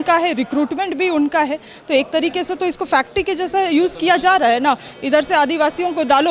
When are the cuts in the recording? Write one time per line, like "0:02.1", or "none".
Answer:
none